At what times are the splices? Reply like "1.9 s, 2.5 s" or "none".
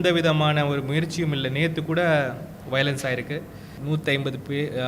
3.7 s

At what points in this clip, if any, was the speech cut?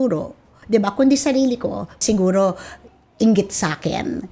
2.0 s

